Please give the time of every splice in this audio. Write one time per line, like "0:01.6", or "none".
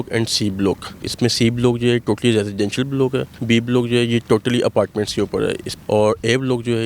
0:01.1
0:03.3
0:05.7